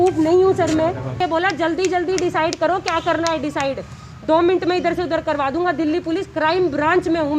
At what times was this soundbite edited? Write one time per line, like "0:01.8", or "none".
0:01.2